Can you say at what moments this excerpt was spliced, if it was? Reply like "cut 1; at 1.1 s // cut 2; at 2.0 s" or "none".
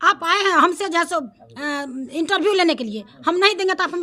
none